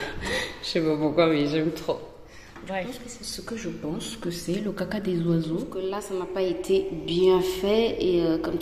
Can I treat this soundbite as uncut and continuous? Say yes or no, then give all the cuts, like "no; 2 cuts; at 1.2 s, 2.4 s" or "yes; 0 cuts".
no; 2 cuts; at 2.9 s, 5.7 s